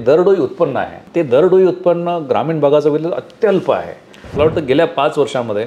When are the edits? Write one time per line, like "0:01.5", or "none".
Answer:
0:00.9
0:04.2

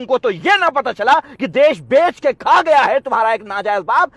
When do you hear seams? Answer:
none

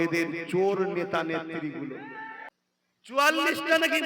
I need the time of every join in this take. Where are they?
0:02.4

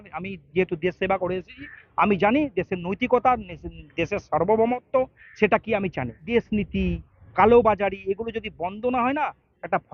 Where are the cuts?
0:06.2

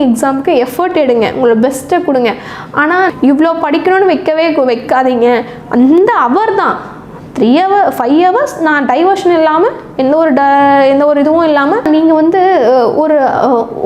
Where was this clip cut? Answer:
0:03.1
0:11.9

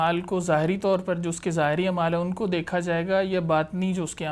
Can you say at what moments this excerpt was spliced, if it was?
none

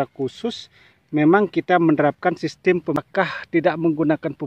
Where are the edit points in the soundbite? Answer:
0:03.0

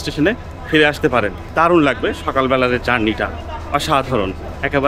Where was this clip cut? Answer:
0:01.4

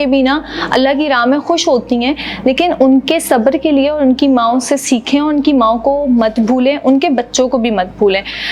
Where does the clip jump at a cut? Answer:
none

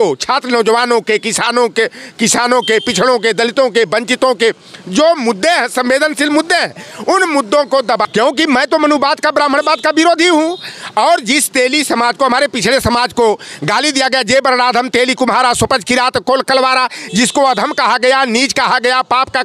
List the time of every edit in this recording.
0:08.1

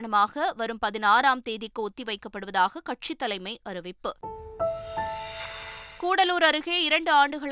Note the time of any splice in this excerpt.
none

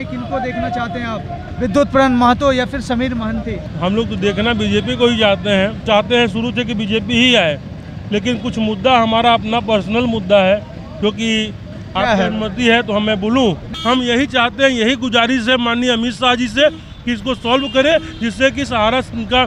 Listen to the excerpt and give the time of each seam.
0:03.6
0:05.8
0:13.7

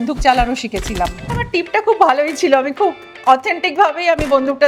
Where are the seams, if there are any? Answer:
0:01.3

